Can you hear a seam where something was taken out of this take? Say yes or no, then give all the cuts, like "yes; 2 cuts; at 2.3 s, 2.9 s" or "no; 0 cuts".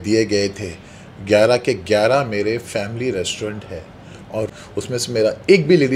yes; 1 cut; at 4.4 s